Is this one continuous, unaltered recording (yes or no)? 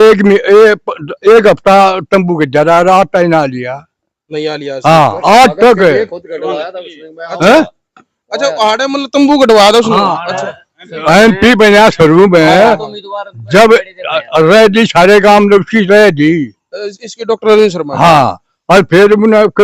yes